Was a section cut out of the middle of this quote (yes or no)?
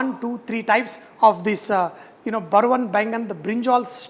no